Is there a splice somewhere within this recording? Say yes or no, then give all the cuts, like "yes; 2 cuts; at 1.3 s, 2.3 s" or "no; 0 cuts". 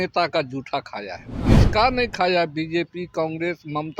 yes; 1 cut; at 1.3 s